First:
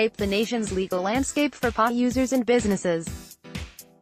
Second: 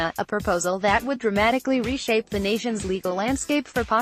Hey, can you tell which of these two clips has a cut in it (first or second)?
first